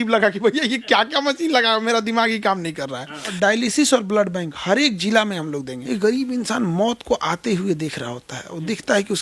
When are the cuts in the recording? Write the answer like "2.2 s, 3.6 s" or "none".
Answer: 3.3 s, 5.8 s